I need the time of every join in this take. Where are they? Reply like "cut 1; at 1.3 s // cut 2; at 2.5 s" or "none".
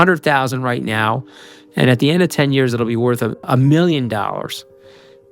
cut 1; at 3.5 s